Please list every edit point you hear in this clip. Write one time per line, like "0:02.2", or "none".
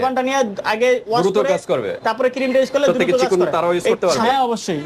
0:03.5